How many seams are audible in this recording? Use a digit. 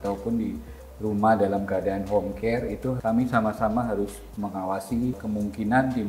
2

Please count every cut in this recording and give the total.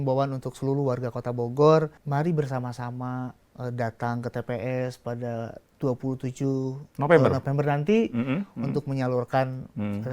3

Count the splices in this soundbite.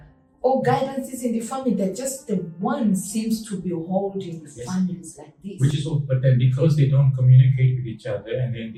0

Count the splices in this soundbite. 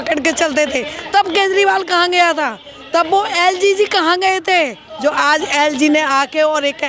0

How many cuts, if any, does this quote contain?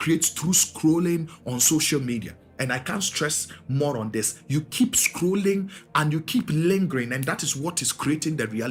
0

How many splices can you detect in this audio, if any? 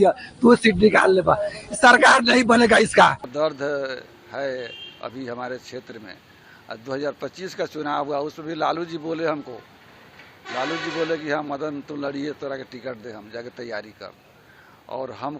1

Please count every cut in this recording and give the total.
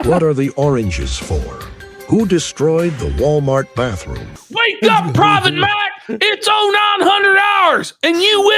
1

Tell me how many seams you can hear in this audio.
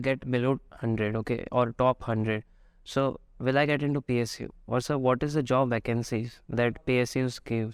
0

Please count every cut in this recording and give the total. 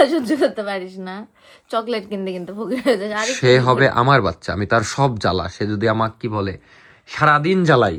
0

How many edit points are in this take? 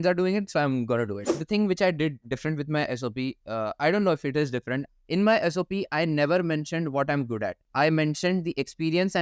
2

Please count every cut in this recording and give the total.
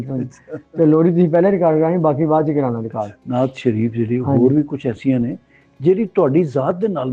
1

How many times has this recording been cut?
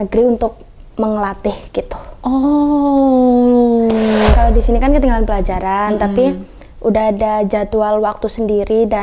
1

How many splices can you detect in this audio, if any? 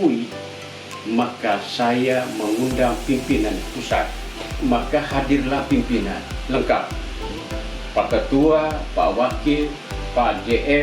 1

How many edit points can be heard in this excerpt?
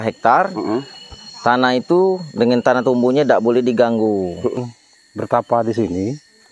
1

